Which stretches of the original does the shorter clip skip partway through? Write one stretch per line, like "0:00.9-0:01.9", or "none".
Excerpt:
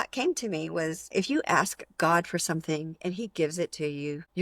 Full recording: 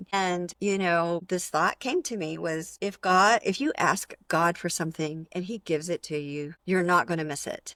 0:02.8-0:03.4

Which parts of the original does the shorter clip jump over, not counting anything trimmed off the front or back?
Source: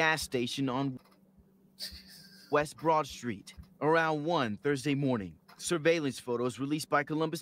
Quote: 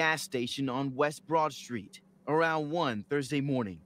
0:00.9-0:02.5

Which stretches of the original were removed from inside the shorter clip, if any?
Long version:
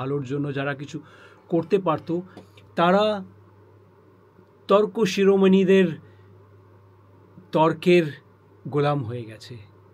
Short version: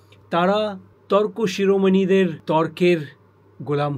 0:03.3-0:04.5
0:06.0-0:07.4

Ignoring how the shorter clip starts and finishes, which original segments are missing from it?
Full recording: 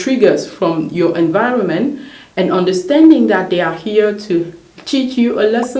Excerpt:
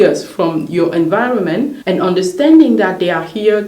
0:02.0-0:02.3

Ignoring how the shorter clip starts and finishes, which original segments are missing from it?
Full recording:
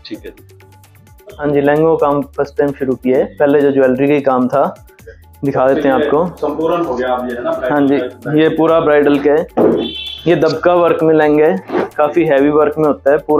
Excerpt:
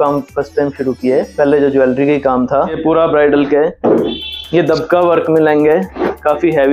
0:04.8-0:08.5

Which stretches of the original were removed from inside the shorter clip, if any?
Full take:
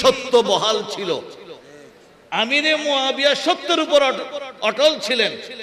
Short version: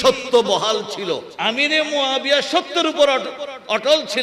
0:01.3-0:02.2

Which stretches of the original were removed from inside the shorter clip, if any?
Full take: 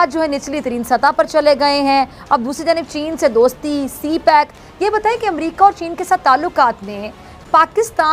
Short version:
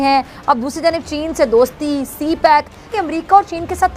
0:04.7-0:05.2

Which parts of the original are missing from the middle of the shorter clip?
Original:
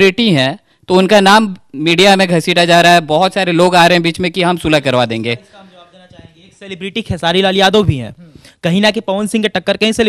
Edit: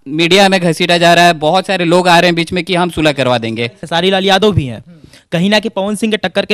0:05.5-0:07.1

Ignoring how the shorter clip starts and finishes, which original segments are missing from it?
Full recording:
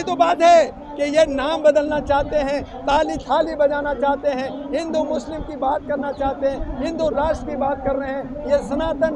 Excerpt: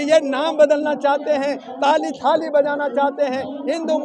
none

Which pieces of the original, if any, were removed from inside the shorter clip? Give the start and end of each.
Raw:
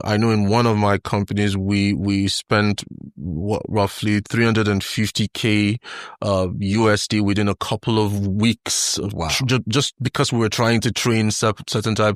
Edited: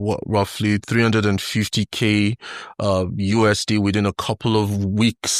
none

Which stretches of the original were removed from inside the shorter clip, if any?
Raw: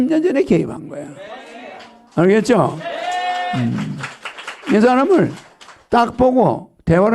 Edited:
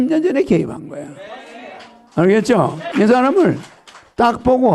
0:02.8-0:04.6

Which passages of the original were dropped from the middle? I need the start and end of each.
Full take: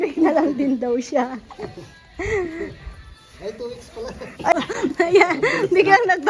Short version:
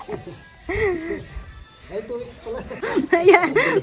0:04.3-0:04.7

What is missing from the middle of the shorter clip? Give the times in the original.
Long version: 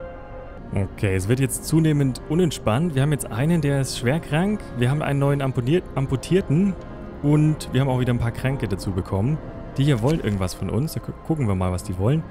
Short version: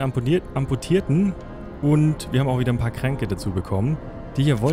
none

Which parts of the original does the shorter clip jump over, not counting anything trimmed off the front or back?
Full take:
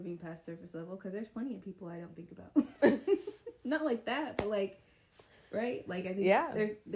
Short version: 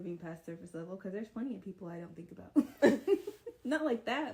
none

